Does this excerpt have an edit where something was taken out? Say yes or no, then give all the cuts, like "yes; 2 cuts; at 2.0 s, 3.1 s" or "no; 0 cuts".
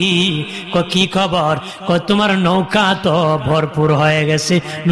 no; 0 cuts